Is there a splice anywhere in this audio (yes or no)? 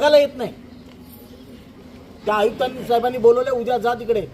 yes